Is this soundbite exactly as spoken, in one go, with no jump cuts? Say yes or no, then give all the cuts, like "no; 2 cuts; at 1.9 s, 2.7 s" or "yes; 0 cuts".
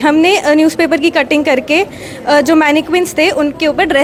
yes; 0 cuts